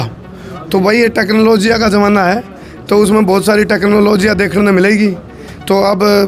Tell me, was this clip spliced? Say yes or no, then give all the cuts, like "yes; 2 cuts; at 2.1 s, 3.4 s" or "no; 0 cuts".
no; 0 cuts